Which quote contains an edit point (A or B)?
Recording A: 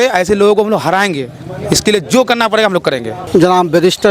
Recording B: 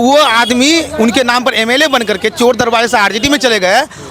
A